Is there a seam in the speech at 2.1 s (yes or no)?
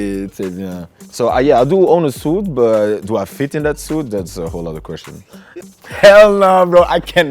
no